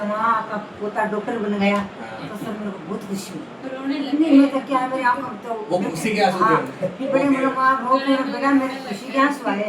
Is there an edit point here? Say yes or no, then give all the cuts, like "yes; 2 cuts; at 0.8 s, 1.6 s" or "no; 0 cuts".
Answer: no; 0 cuts